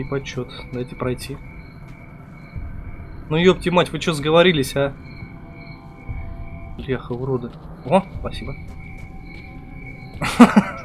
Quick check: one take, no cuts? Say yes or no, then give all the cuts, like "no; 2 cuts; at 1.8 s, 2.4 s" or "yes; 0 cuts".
no; 1 cut; at 6.8 s